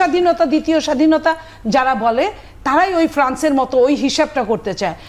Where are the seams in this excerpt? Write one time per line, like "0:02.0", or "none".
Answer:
none